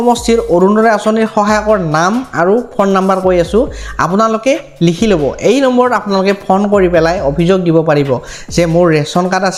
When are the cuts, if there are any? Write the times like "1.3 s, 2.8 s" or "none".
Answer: none